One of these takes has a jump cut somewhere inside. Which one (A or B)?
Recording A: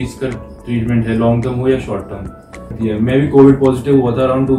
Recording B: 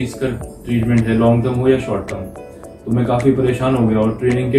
A